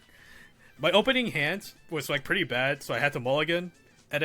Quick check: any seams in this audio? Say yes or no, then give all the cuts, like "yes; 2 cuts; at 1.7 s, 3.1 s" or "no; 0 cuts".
yes; 1 cut; at 1.8 s